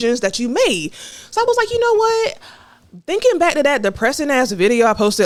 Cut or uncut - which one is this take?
uncut